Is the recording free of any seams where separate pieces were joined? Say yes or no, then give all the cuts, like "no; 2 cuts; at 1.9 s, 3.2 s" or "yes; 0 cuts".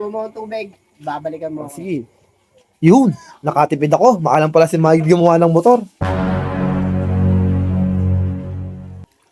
yes; 0 cuts